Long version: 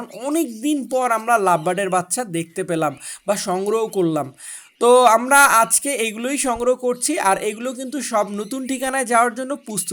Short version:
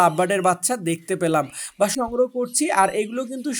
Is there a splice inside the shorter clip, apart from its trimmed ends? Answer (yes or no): yes